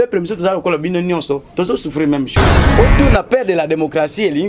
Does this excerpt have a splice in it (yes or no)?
yes